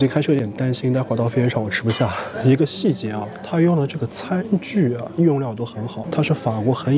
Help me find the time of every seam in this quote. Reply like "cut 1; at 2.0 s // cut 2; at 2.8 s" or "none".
none